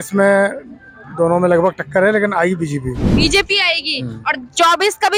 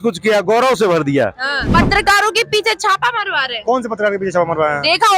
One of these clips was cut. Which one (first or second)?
second